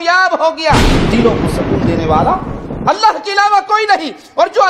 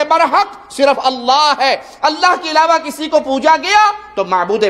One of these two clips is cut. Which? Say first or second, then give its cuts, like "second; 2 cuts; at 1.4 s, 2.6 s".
first; 1 cut; at 0.9 s